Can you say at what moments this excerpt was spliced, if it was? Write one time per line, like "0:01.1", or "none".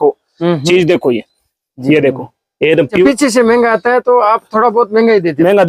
0:03.1